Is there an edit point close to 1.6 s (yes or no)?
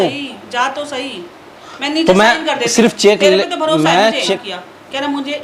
no